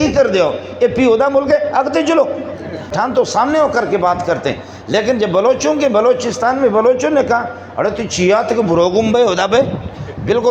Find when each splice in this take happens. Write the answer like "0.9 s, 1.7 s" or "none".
2.9 s